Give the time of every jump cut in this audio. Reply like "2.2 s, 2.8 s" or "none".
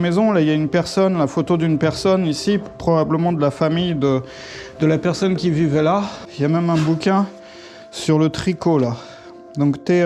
6.3 s